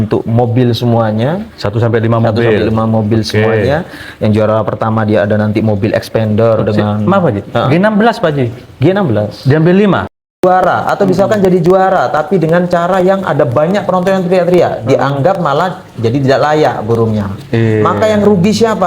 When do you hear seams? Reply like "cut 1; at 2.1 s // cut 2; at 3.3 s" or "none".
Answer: cut 1; at 10.1 s